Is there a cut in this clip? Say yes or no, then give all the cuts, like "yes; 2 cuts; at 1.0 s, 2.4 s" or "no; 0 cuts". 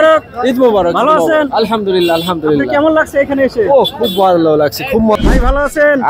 yes; 1 cut; at 5.2 s